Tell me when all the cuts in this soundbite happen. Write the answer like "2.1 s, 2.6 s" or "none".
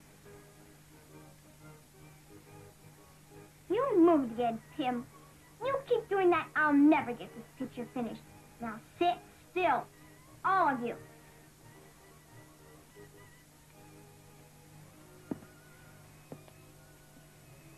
none